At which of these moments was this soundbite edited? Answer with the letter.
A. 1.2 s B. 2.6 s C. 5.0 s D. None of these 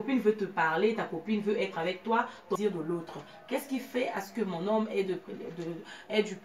B